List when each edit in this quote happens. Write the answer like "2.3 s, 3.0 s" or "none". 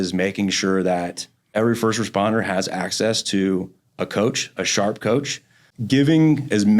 1.5 s, 5.7 s